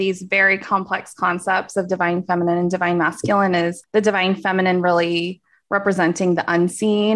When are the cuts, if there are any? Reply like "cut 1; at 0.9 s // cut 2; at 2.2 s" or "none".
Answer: cut 1; at 3.8 s